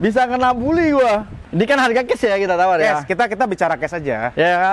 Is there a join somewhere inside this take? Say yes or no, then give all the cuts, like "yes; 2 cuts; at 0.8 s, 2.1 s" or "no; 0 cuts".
yes; 1 cut; at 1.4 s